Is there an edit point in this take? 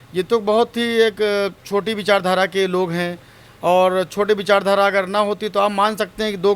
no; 0 cuts

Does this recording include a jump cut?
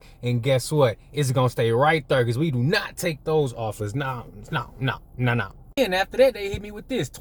no; 0 cuts

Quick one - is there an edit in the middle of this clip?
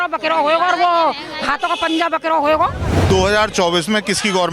yes; 1 cut; at 3.0 s

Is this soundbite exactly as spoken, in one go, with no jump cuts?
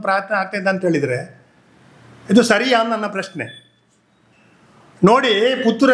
yes; 0 cuts

